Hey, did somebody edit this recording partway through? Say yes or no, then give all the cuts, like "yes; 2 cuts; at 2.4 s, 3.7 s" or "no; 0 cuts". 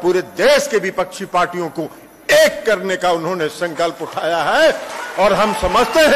no; 0 cuts